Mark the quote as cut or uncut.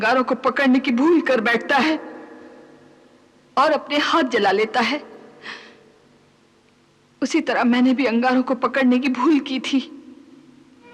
uncut